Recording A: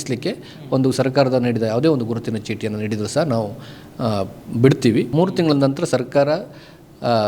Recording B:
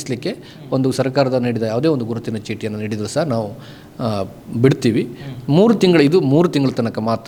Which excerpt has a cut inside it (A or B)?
A